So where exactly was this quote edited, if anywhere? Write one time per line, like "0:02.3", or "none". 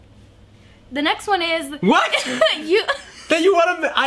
none